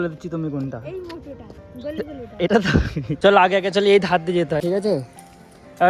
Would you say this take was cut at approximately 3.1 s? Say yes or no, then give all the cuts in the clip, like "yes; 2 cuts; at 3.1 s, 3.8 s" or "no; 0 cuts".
yes; 1 cut; at 3.1 s